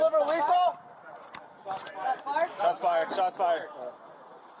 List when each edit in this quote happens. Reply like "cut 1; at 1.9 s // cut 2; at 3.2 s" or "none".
none